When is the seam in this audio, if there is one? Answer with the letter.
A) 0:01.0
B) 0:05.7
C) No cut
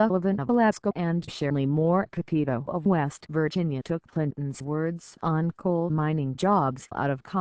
A